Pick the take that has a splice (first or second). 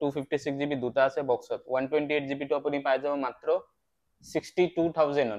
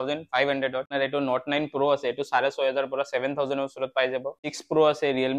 second